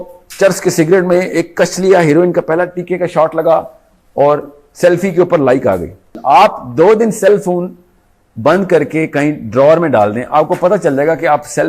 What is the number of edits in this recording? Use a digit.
1